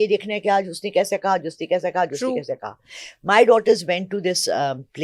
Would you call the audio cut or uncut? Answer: uncut